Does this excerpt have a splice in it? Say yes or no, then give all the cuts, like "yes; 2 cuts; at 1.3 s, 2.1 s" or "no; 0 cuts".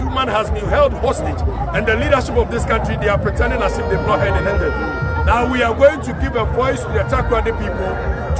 no; 0 cuts